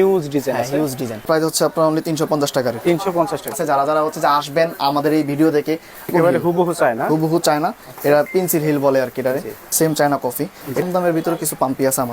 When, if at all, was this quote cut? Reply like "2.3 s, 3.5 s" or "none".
1.2 s, 3.5 s, 6.1 s, 9.5 s, 10.8 s